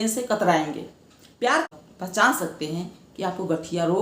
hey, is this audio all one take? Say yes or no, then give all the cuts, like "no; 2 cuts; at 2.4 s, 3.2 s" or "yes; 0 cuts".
no; 1 cut; at 1.7 s